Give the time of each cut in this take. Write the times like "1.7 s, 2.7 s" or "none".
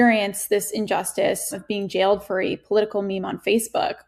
1.6 s